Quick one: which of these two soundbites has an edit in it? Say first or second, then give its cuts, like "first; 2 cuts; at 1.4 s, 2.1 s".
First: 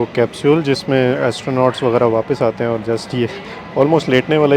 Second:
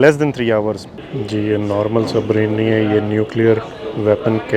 second; 1 cut; at 0.9 s